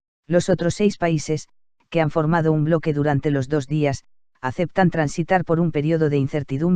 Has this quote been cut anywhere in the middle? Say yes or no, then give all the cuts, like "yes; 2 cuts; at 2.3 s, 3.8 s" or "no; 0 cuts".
no; 0 cuts